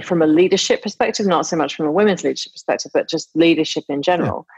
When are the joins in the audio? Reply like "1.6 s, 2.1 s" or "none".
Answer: none